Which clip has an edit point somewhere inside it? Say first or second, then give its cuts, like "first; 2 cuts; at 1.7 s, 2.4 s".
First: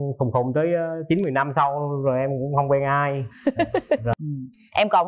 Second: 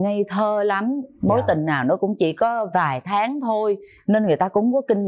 first; 1 cut; at 4.1 s